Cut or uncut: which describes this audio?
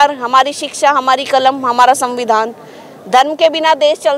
uncut